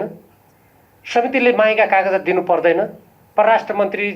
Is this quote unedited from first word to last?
no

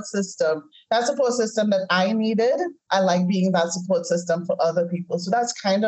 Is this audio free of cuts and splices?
yes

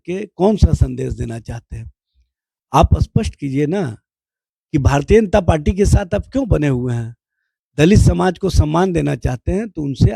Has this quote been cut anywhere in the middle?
no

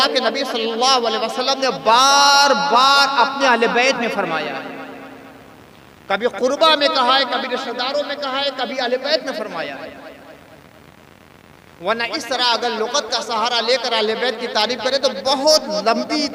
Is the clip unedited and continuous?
yes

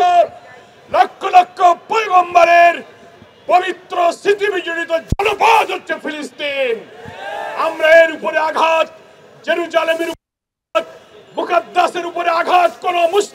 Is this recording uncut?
yes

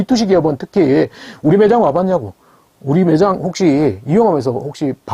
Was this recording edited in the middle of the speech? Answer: no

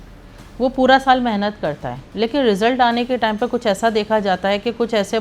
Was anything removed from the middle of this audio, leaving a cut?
no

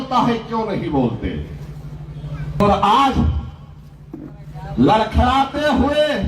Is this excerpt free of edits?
no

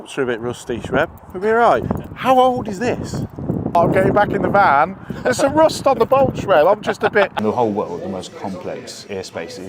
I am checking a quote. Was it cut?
yes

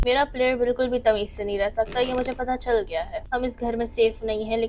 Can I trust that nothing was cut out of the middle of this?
no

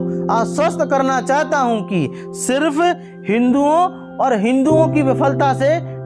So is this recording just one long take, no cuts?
yes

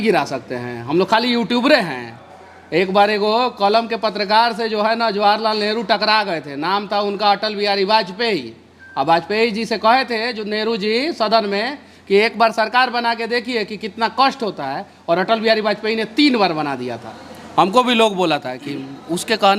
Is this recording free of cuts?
yes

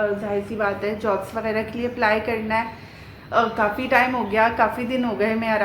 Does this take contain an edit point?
no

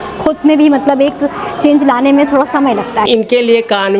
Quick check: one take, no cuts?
no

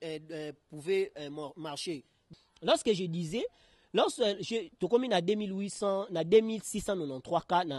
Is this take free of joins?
no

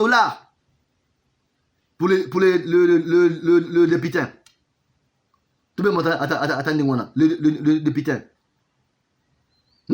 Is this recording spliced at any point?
no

